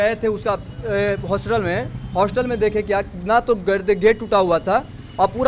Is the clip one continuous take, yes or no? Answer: yes